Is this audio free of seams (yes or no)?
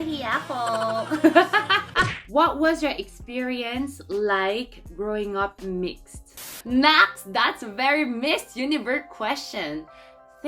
no